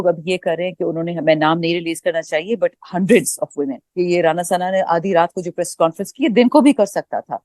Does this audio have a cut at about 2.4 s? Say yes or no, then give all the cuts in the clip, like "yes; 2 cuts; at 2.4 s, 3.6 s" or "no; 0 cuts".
no; 1 cut; at 3.8 s